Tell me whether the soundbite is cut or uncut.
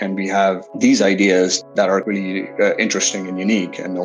cut